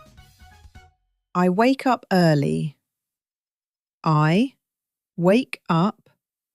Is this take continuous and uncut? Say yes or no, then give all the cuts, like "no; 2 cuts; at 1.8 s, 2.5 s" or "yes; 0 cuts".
no; 1 cut; at 1.1 s